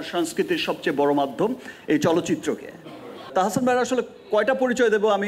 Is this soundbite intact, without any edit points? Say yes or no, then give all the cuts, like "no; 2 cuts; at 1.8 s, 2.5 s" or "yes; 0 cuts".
no; 1 cut; at 3.3 s